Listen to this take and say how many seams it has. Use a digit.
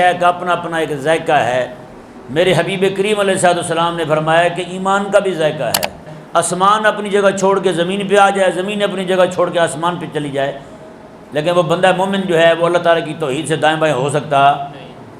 1